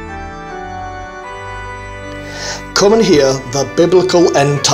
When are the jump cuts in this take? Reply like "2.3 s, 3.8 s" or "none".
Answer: 2.7 s